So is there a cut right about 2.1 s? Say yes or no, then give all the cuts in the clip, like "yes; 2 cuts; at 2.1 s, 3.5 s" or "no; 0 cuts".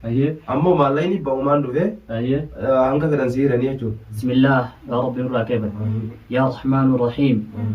no; 1 cut; at 4.1 s